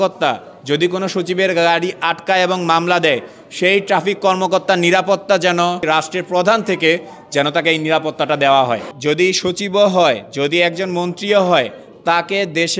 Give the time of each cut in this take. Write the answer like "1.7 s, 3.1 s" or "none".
5.8 s, 8.9 s